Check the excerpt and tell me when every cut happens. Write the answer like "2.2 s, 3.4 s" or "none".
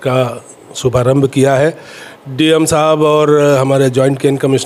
none